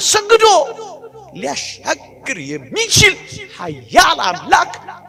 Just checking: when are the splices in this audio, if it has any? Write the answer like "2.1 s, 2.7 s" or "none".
none